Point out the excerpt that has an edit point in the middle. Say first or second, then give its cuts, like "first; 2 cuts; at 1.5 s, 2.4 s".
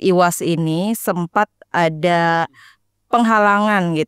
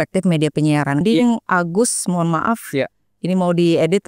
second; 1 cut; at 1.0 s